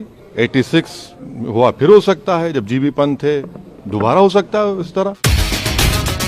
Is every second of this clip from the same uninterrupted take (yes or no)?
yes